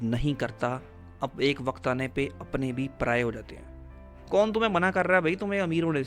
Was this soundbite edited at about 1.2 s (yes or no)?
no